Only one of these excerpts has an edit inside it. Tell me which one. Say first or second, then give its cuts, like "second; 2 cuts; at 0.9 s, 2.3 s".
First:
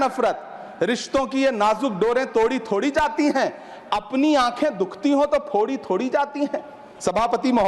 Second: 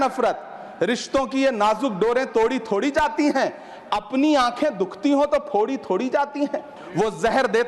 second; 1 cut; at 6.8 s